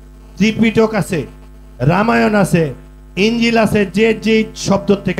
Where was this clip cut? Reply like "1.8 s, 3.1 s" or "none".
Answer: none